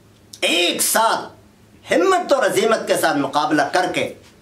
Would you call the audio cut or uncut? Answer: uncut